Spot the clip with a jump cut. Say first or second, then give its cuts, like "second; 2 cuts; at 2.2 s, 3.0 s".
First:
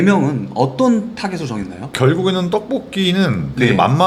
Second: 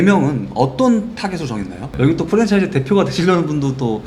second; 1 cut; at 1.9 s